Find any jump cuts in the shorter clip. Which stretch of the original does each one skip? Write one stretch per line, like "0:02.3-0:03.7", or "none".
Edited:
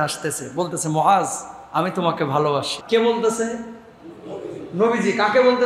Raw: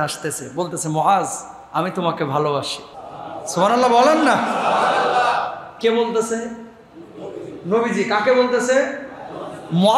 0:02.8-0:05.7